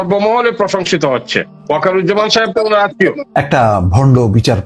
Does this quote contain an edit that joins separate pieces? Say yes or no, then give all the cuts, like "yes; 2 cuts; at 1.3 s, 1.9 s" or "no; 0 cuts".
yes; 2 cuts; at 1.5 s, 3.2 s